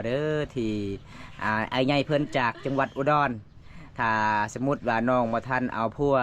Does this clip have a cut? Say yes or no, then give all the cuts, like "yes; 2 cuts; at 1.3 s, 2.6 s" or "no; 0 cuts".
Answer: no; 0 cuts